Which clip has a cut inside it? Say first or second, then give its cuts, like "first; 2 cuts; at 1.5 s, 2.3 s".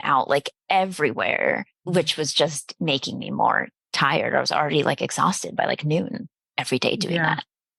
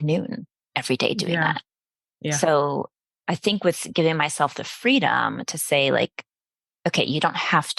first; 1 cut; at 1.7 s